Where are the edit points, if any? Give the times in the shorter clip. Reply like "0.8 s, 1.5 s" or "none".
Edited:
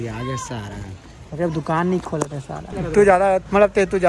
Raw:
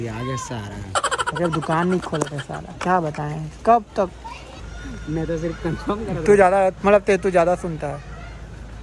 2.7 s